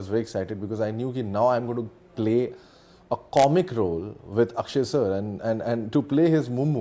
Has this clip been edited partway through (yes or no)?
no